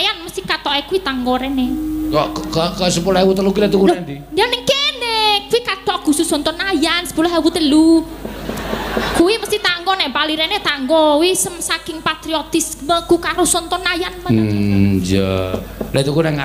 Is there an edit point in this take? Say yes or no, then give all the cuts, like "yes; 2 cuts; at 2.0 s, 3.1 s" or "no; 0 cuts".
no; 0 cuts